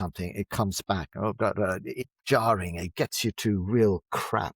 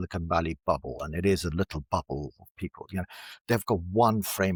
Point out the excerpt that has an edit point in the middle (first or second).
first